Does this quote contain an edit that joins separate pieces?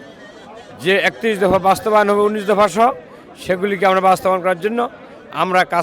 no; 0 cuts

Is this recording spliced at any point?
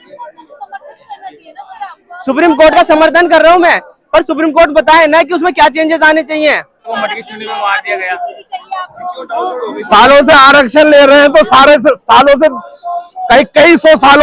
yes; 1 cut; at 6.9 s

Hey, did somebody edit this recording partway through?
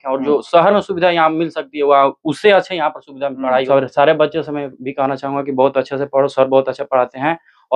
yes; 1 cut; at 3.7 s

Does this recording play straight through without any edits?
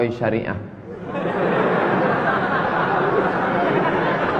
yes; 0 cuts

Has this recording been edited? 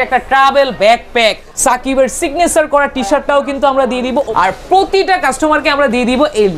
yes; 2 cuts; at 1.5 s, 4.2 s

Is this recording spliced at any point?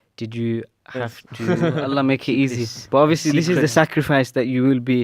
yes; 1 cut; at 1.5 s

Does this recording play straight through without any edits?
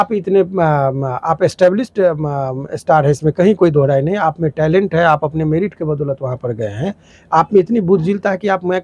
yes; 0 cuts

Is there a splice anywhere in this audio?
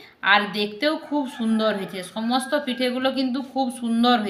no; 0 cuts

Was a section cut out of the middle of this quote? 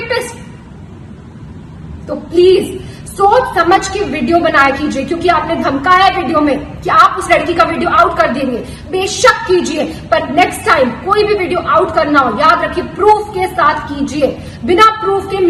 no; 0 cuts

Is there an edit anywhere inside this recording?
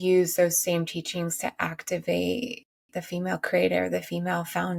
no; 0 cuts

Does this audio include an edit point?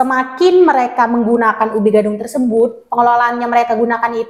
no; 0 cuts

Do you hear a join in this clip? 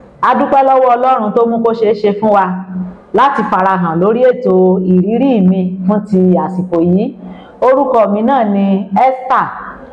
no; 0 cuts

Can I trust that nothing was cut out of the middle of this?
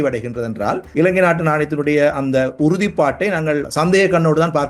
no; 2 cuts; at 0.8 s, 3.7 s

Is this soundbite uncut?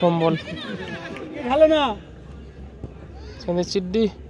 no; 1 cut; at 1.4 s

